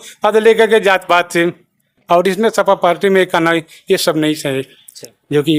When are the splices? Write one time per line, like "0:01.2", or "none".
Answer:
none